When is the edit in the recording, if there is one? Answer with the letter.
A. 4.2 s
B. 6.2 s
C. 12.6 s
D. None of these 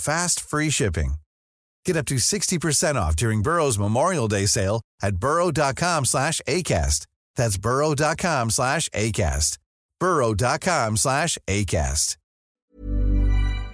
C